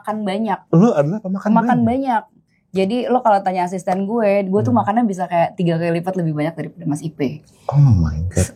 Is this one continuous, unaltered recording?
yes; 0 cuts

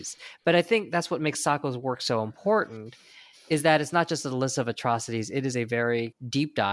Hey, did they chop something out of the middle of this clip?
no; 0 cuts

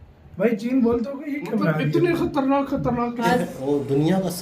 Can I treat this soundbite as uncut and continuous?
no; 1 cut; at 3.2 s

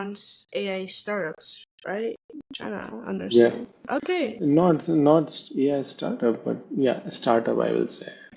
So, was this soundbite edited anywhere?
no; 0 cuts

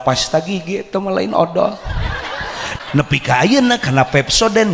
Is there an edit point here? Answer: yes; 1 cut; at 2.7 s

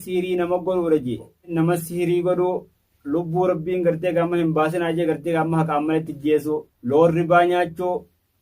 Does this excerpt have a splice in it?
yes; 1 cut; at 1.4 s

